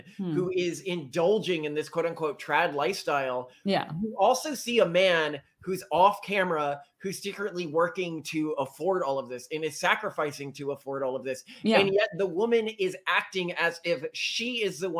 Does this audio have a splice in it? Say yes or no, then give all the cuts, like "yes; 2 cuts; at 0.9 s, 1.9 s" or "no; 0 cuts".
no; 0 cuts